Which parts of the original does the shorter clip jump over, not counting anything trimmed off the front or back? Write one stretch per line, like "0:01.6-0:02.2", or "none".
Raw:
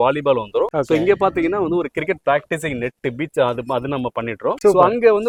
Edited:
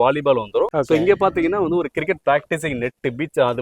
none

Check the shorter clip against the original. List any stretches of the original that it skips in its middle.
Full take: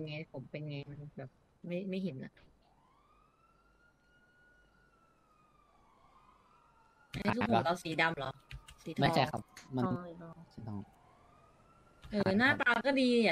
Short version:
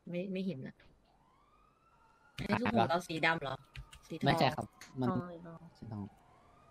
0:03.5-0:06.7

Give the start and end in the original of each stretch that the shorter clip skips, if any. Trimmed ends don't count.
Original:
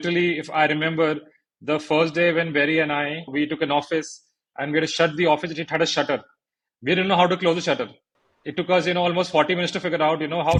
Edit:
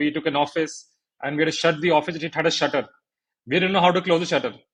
none

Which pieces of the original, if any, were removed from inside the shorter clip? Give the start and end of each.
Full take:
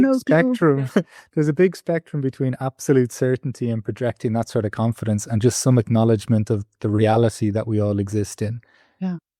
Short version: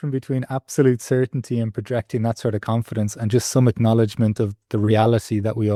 none

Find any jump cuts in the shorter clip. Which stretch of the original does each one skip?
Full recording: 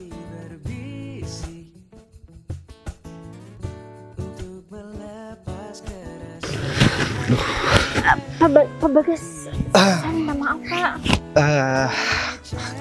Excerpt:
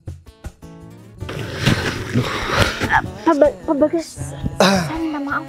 0:03.7-0:06.4

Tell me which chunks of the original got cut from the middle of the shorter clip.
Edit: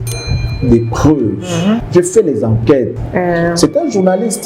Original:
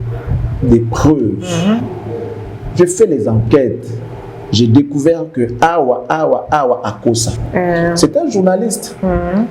0:01.8-0:02.7
0:03.8-0:07.4

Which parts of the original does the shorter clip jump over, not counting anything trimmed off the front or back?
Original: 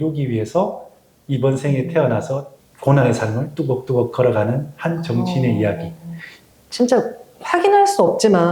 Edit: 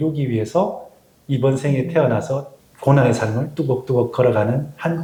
none

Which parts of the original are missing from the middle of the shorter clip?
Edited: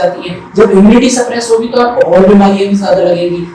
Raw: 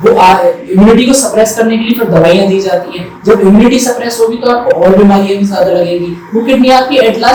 none

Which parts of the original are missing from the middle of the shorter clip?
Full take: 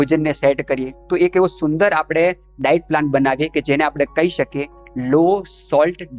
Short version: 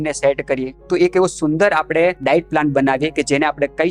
0:02.4-0:02.6

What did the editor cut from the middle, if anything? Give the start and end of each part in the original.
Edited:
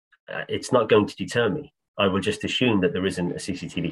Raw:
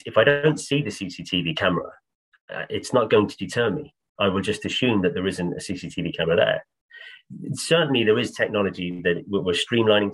none

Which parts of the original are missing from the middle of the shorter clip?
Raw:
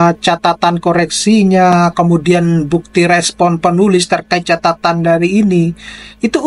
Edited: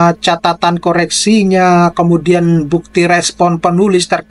none

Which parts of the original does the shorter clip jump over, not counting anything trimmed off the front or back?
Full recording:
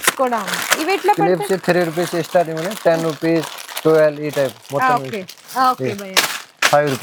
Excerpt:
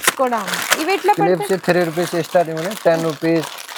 none

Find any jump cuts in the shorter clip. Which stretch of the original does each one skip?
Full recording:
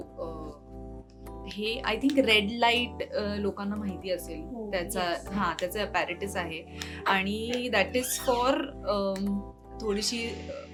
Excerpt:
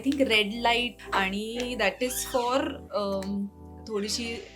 0:02.9-0:06.9

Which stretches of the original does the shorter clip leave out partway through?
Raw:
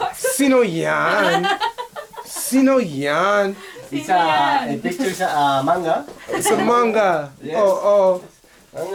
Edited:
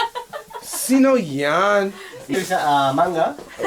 0:04.0-0:05.0

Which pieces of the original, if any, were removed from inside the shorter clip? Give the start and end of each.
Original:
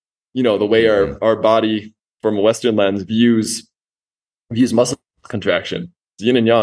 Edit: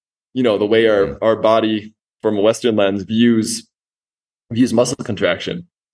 0:05.0-0:05.3

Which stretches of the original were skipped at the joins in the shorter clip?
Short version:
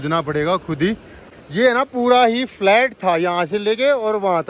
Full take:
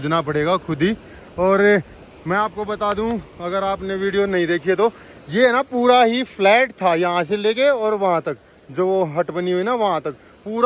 0:01.3-0:05.0

